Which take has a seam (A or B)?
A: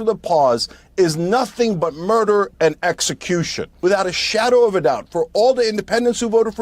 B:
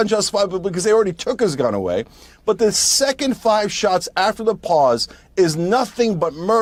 A